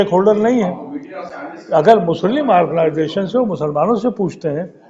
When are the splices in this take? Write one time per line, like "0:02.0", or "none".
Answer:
none